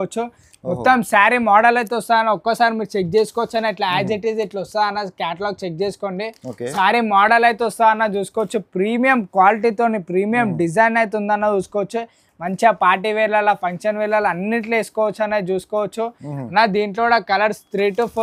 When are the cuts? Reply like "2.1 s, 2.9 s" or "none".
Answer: none